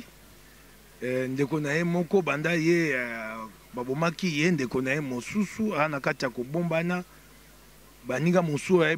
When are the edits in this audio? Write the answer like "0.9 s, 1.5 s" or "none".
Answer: none